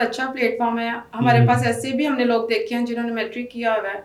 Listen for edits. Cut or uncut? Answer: uncut